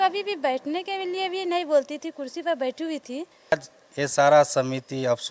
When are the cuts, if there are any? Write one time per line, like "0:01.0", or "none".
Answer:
0:03.5